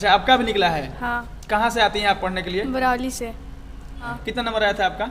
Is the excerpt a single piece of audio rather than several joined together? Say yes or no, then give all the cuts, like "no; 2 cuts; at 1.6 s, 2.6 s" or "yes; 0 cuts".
no; 1 cut; at 4.1 s